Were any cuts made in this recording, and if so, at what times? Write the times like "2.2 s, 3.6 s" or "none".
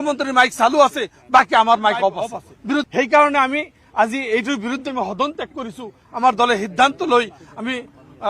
2.8 s